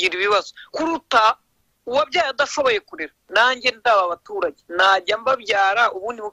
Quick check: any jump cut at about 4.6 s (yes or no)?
yes